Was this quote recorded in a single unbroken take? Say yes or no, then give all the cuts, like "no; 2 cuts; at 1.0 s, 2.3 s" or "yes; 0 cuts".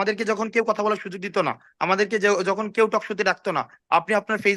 yes; 0 cuts